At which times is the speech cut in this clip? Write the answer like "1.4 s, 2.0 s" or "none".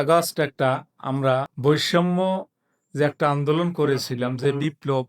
1.5 s